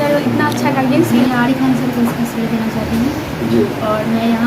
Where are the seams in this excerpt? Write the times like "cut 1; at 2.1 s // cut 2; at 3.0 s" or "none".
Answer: cut 1; at 1.1 s